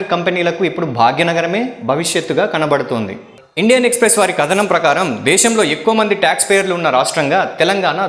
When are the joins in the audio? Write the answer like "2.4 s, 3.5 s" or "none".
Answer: none